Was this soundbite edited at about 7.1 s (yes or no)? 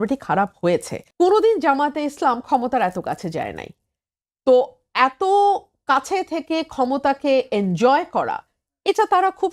no